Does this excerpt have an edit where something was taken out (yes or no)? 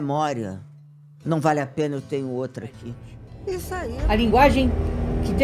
yes